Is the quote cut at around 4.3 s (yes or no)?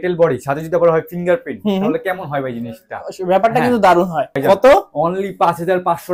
yes